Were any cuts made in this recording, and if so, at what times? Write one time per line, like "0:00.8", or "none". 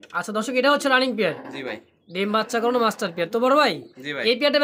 none